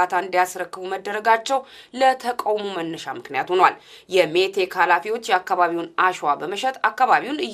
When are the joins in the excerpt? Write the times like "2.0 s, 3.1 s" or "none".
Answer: none